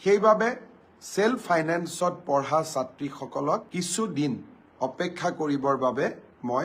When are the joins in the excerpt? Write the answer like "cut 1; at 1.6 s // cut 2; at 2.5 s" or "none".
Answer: cut 1; at 3.7 s // cut 2; at 4.7 s